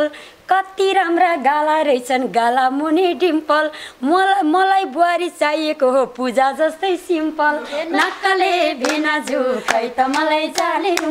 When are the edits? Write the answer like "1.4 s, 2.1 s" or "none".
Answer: none